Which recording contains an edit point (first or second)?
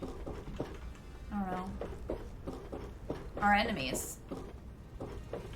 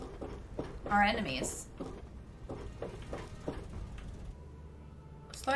second